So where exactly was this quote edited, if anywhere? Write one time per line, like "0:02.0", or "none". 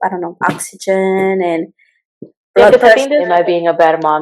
0:03.2